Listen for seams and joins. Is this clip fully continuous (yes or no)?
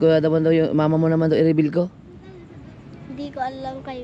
yes